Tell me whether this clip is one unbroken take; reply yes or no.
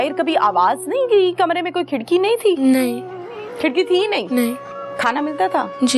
yes